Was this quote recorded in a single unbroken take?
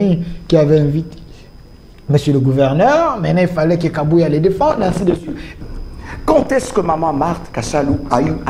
no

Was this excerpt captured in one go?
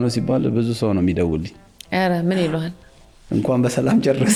yes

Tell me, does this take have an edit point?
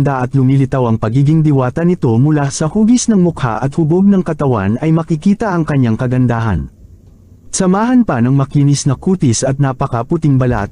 no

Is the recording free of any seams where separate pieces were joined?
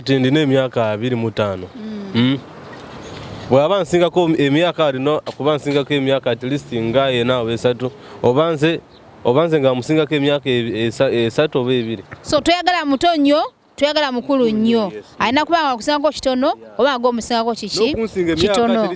yes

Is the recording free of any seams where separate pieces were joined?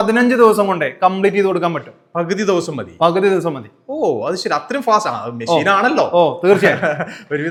yes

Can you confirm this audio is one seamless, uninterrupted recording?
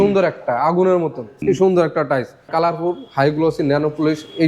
no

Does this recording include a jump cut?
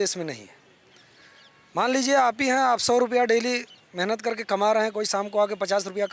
no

